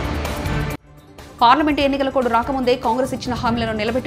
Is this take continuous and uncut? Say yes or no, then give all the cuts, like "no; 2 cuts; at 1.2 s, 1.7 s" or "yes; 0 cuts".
no; 1 cut; at 0.9 s